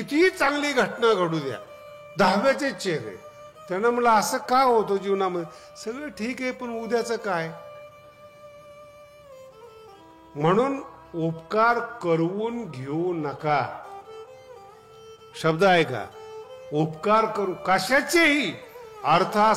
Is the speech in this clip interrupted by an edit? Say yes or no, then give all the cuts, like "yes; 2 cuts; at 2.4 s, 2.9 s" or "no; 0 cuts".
no; 0 cuts